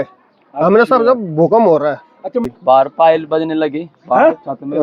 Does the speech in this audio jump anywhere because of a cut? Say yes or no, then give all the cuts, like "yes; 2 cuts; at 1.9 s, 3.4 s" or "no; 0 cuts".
yes; 1 cut; at 2.5 s